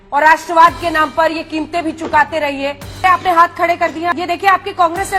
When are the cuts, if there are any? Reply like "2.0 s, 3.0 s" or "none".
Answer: 3.0 s, 4.1 s